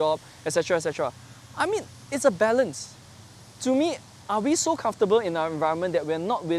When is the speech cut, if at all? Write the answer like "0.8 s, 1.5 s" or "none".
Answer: none